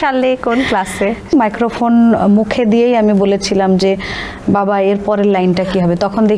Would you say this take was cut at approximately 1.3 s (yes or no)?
yes